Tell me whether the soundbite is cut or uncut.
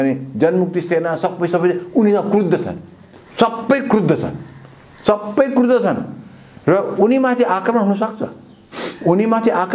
uncut